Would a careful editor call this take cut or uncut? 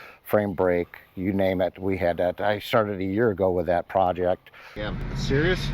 cut